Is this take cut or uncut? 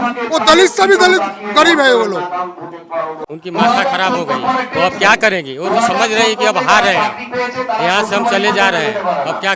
cut